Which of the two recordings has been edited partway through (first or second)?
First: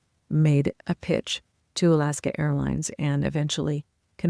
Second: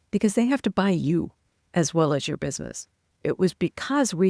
second